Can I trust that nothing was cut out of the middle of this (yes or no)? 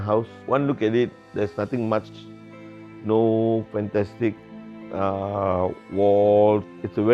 yes